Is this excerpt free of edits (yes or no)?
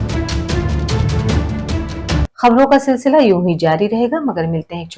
no